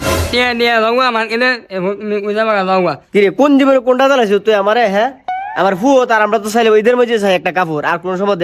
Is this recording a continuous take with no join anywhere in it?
yes; 0 cuts

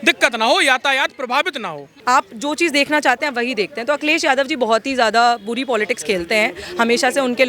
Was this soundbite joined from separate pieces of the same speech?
yes; 1 cut; at 1.9 s

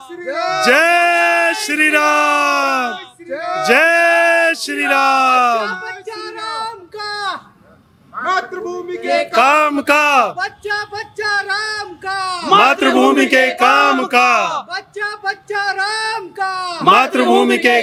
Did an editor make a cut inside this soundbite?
no; 0 cuts

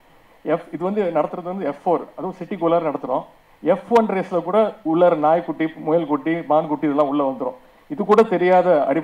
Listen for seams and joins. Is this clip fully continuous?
yes; 0 cuts

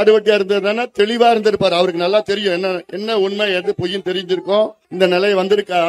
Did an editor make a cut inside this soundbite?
yes; 1 cut; at 4.8 s

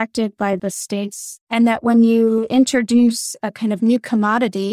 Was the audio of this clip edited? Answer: yes; 1 cut; at 1.4 s

